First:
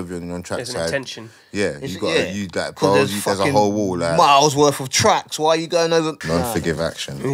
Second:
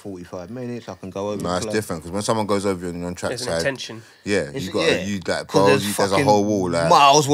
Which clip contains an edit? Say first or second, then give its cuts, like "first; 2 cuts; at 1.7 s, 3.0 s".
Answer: first; 1 cut; at 6.2 s